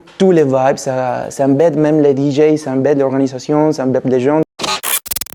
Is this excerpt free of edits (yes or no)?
no